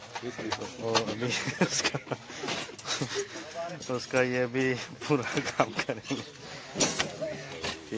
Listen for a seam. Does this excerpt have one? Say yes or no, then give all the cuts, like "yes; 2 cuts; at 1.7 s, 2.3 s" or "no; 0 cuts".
no; 0 cuts